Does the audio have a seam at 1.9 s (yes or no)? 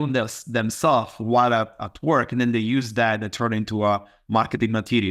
no